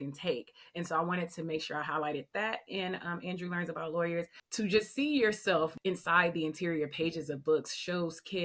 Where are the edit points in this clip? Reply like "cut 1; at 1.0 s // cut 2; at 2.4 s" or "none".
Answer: cut 1; at 4.4 s // cut 2; at 5.8 s

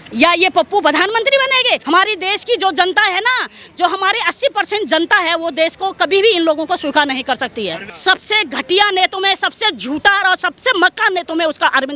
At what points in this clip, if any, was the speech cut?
cut 1; at 1.8 s // cut 2; at 7.8 s

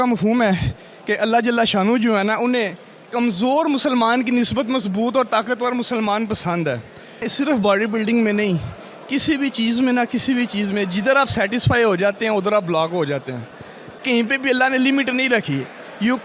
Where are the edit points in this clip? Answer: cut 1; at 7.3 s // cut 2; at 14.0 s

